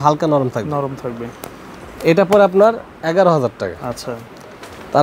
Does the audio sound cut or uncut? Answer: uncut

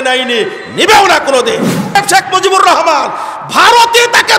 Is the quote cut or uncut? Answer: cut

